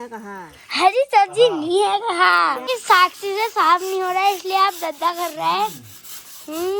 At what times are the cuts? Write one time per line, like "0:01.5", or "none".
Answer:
0:02.7